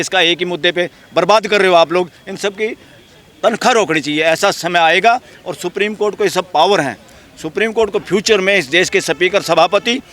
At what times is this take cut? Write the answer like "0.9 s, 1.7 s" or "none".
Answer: none